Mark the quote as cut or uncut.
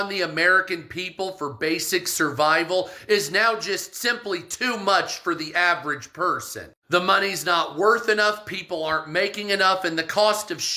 uncut